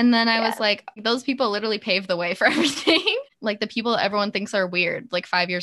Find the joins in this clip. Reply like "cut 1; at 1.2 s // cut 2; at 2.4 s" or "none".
cut 1; at 1.0 s // cut 2; at 3.3 s